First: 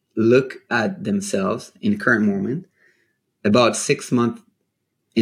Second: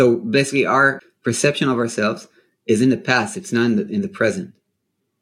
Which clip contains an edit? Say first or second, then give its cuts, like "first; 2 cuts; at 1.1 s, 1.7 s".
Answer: second; 1 cut; at 1.1 s